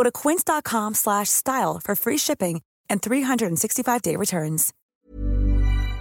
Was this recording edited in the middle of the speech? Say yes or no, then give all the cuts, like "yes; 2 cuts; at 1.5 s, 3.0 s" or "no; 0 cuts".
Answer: yes; 1 cut; at 4.9 s